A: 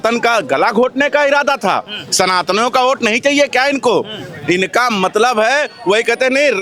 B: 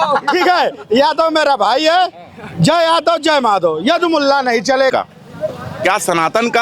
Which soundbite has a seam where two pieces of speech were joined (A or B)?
B